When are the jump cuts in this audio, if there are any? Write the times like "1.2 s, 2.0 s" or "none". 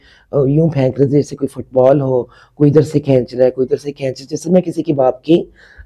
none